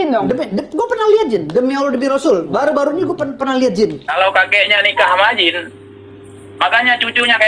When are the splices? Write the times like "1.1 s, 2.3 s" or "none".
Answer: 4.1 s